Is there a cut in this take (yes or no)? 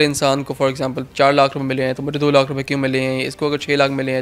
no